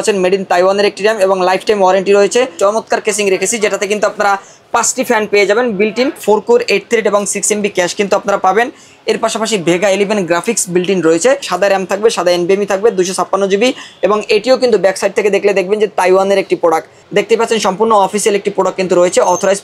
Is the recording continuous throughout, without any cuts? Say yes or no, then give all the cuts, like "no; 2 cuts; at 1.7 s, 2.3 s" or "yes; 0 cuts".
no; 4 cuts; at 2.5 s, 6.2 s, 11.5 s, 17.0 s